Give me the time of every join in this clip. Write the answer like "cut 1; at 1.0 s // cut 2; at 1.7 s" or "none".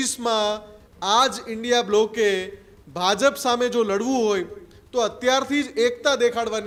none